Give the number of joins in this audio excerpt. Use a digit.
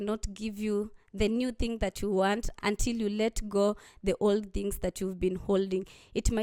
1